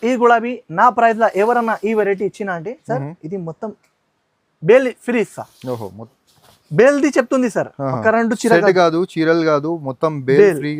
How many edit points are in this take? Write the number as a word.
zero